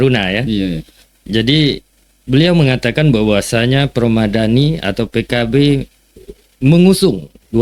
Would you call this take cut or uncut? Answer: uncut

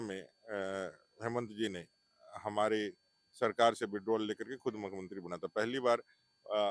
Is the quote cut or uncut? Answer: uncut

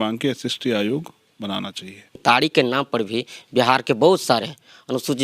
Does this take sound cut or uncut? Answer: cut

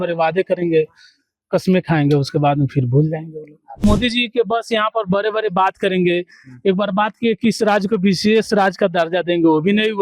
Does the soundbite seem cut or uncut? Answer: cut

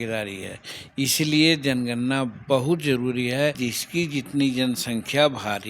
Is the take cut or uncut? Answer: cut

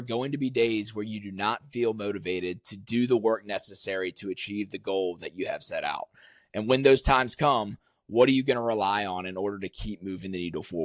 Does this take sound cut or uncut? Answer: uncut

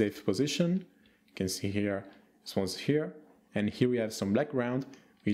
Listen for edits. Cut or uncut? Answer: uncut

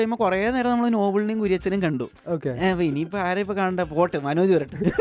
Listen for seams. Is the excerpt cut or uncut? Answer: uncut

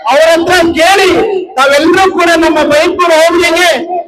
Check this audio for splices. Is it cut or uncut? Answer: uncut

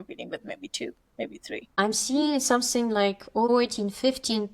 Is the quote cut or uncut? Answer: cut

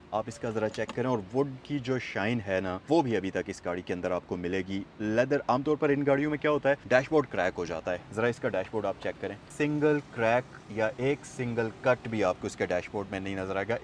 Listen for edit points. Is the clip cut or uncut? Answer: uncut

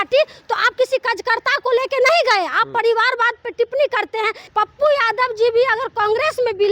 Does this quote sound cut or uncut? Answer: cut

